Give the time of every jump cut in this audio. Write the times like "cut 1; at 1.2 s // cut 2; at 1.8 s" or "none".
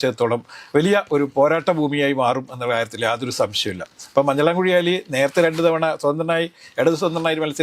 none